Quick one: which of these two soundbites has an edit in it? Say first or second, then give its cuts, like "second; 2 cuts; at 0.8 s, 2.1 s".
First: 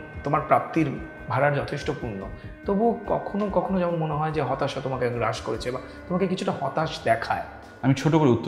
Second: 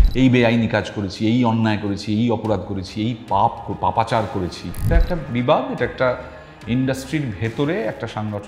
second; 1 cut; at 4.8 s